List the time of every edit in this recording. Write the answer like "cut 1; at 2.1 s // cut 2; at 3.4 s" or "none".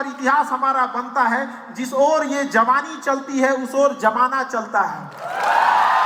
none